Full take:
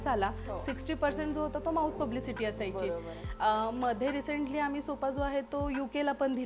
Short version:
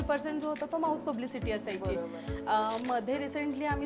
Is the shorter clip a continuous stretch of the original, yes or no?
yes